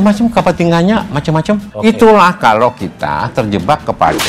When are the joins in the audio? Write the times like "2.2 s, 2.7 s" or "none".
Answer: 1.7 s